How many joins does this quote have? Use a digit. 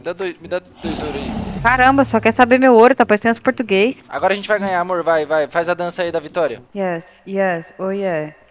1